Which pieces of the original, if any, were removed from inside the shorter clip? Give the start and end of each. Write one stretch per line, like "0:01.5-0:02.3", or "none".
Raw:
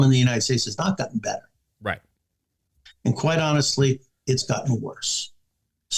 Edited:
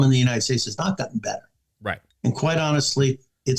0:02.1-0:02.9